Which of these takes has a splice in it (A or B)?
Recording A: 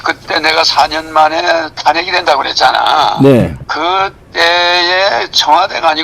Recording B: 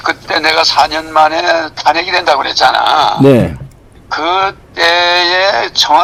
A